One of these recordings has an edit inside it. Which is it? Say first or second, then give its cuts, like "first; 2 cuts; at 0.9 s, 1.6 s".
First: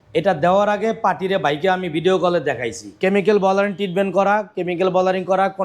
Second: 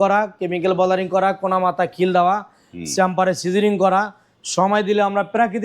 first; 1 cut; at 3.0 s